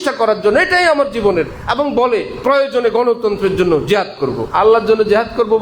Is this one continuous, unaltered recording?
no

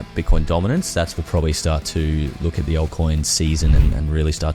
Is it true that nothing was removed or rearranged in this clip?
no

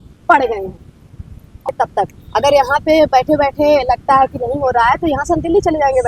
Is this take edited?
yes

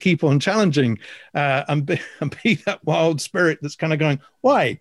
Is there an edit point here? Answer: no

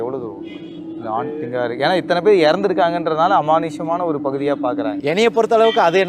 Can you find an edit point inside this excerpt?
yes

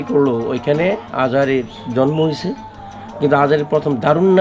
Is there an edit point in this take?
no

